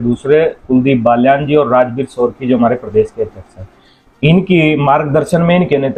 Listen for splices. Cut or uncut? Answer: uncut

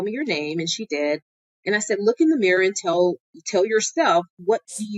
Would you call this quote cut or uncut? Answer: uncut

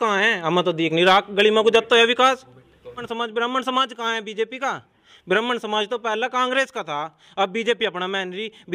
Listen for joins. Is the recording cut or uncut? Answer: cut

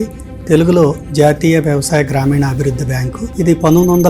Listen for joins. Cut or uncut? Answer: cut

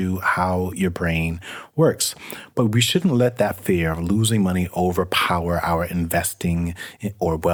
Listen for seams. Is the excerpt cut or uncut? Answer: uncut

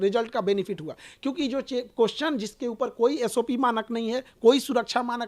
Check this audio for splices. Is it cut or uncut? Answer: uncut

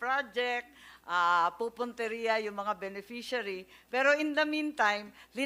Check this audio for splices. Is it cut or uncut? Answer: uncut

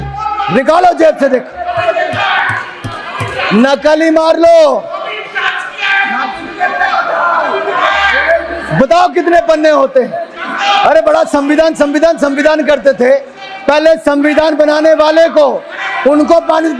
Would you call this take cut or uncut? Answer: uncut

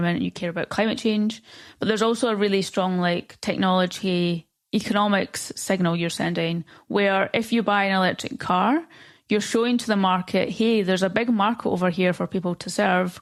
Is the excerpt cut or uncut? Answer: uncut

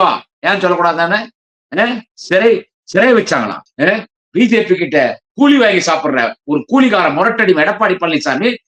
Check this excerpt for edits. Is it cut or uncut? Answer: cut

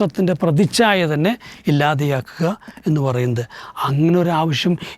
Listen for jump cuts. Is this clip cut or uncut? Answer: uncut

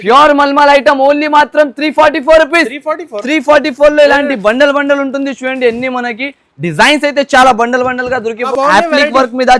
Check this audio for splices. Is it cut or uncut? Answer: cut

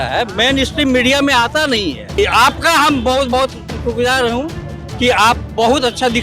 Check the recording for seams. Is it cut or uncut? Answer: cut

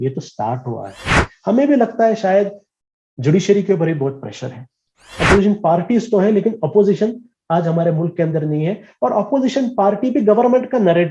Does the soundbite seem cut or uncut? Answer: cut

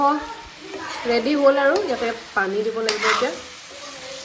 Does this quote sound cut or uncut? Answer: uncut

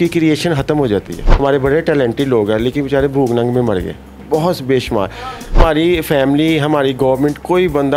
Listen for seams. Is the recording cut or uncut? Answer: cut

